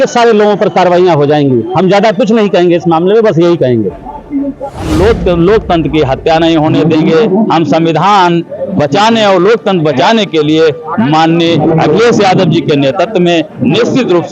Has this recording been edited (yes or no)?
yes